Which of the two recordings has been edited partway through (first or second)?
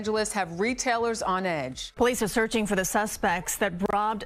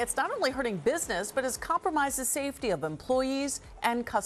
first